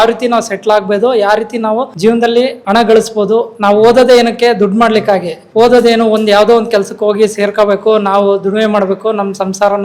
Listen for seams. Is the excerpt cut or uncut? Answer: uncut